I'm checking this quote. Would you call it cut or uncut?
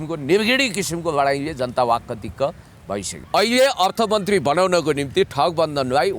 cut